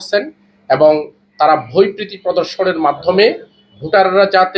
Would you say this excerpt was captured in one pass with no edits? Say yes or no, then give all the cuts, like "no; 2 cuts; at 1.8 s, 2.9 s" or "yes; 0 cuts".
yes; 0 cuts